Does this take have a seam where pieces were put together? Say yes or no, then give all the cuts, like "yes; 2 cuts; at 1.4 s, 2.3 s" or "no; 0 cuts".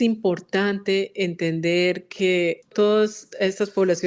yes; 1 cut; at 2.7 s